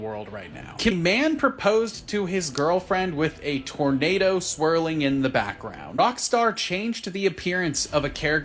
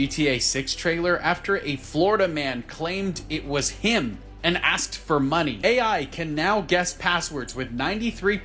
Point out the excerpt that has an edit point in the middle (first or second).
first